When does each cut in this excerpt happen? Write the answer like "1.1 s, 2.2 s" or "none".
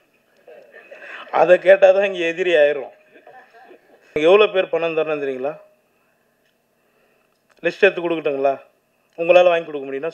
4.2 s